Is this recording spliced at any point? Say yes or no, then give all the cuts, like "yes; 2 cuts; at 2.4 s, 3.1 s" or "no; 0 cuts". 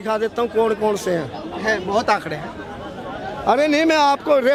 no; 0 cuts